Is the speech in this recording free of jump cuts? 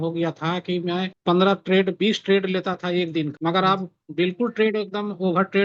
no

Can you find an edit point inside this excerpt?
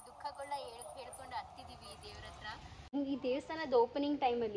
yes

